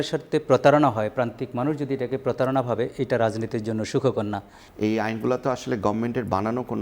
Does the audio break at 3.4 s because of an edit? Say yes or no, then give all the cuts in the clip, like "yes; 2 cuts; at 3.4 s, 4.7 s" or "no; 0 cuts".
no; 1 cut; at 4.6 s